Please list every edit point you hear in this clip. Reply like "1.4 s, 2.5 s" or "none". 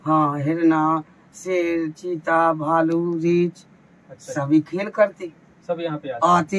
none